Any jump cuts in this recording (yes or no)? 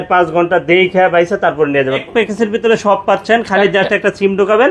yes